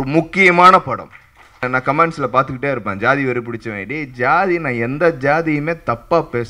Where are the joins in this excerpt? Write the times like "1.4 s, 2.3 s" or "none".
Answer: 1.6 s

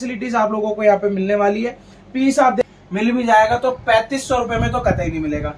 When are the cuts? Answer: 2.6 s

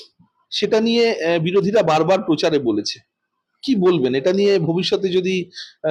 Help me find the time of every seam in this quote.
none

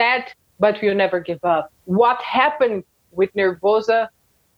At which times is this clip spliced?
1.8 s

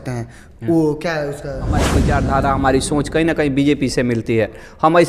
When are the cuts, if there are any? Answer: 1.9 s

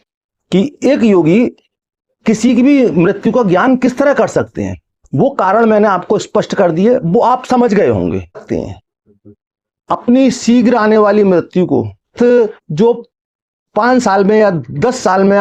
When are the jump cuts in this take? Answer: 8.4 s

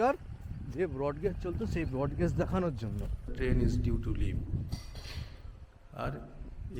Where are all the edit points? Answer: 3.3 s

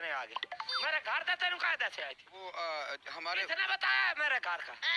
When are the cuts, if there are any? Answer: none

